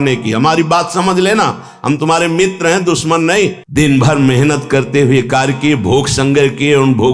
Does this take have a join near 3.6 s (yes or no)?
yes